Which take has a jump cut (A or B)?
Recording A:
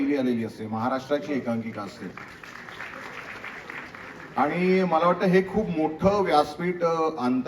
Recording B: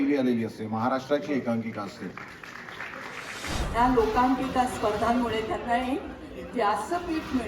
B